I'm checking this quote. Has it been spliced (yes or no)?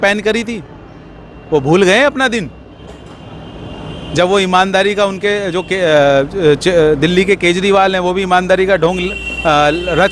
no